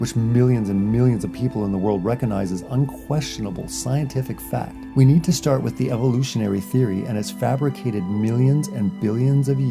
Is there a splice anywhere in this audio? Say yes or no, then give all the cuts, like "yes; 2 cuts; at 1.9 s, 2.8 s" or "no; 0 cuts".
yes; 1 cut; at 5.4 s